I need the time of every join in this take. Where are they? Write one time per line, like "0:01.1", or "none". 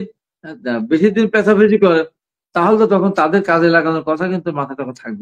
none